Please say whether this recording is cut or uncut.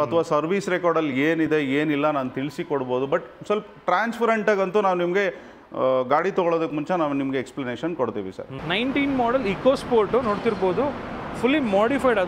cut